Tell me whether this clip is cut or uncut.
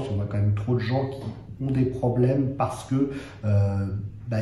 uncut